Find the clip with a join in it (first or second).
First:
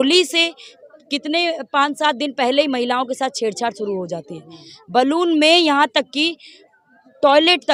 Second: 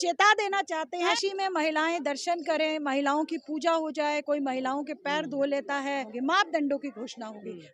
second